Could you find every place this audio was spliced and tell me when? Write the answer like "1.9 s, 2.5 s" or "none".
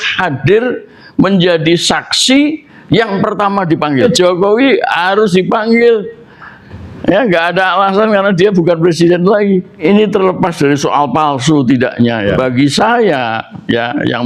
4.0 s, 9.8 s, 12.3 s